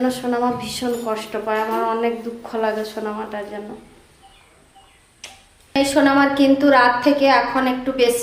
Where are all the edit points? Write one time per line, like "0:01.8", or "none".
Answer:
0:05.8